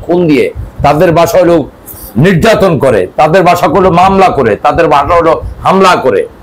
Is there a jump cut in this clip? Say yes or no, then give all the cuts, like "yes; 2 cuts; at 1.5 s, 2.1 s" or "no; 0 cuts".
no; 0 cuts